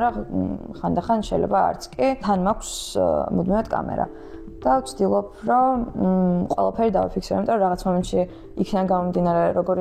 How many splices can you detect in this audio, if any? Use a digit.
1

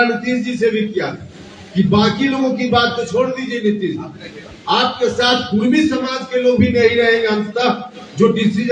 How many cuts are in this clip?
0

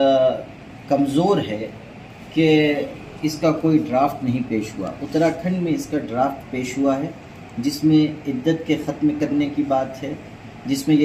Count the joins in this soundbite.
0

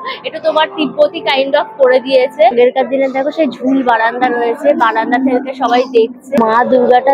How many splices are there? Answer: 2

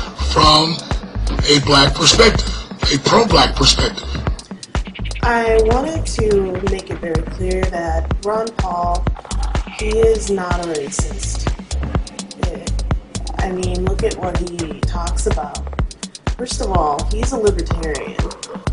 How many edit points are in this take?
1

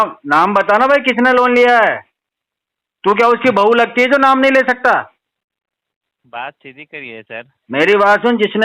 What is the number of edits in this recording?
0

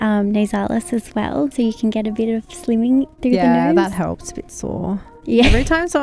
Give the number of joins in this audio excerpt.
1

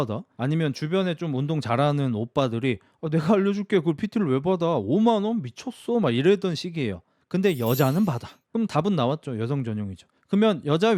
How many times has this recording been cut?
1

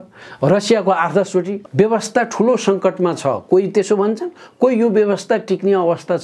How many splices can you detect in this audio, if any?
1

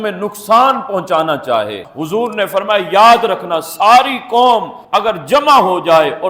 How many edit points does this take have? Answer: 1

